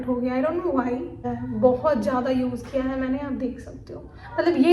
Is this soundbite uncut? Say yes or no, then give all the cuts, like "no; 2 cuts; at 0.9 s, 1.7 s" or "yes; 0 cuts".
no; 1 cut; at 1.3 s